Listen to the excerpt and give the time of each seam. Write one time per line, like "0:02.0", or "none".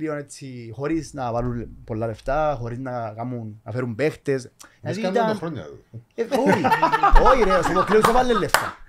none